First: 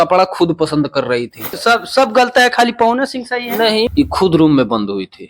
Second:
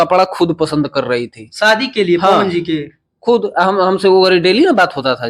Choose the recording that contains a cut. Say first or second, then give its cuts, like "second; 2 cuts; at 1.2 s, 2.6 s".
first; 2 cuts; at 1.6 s, 3.9 s